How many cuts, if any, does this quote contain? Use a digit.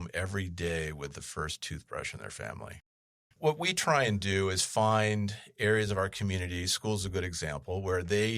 1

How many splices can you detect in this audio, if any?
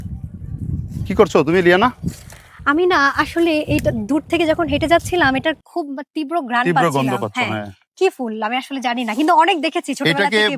1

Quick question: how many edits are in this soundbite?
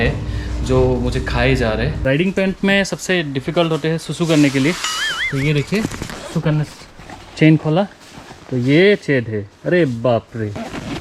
1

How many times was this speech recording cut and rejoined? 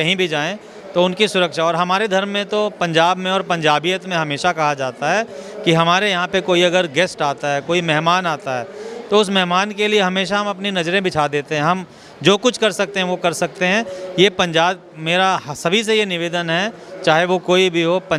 0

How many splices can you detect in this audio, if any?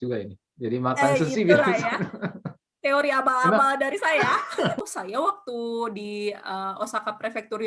1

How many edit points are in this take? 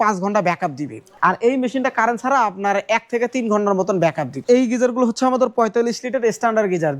2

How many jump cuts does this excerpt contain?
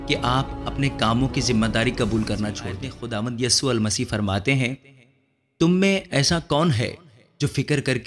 1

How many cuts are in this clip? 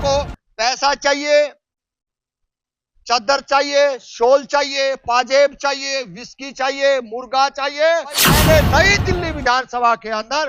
1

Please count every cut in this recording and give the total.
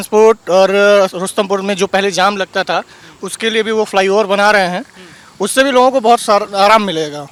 0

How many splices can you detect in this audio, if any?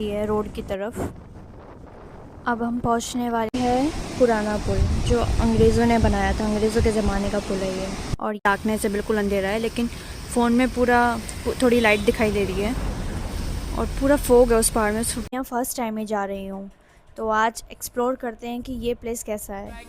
3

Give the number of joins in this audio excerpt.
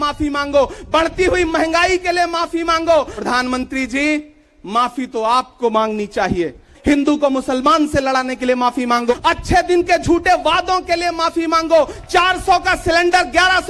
4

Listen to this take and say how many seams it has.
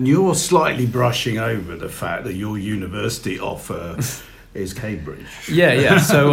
0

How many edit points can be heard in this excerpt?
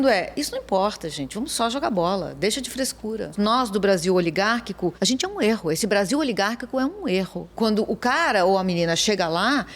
3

